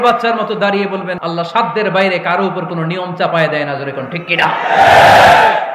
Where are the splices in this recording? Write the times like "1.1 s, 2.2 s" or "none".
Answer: 1.1 s

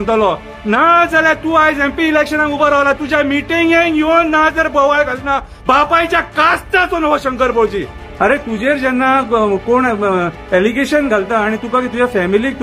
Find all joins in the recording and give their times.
8.0 s

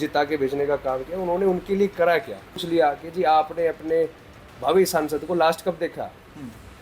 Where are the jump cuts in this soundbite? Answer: 2.6 s

